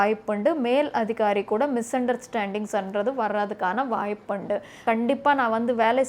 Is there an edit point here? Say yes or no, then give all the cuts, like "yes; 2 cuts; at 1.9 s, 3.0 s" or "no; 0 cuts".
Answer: yes; 1 cut; at 4.8 s